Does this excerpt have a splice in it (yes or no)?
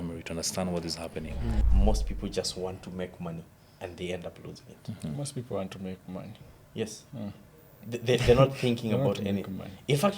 yes